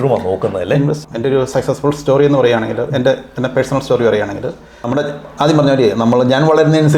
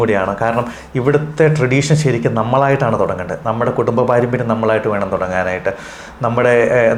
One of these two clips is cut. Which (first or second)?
first